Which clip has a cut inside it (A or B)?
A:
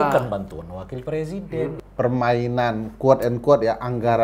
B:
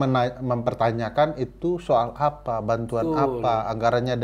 A